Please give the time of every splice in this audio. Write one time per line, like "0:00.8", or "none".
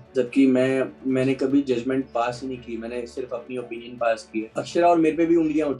0:04.5